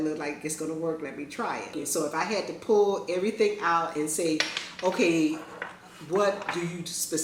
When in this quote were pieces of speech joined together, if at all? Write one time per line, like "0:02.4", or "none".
0:01.8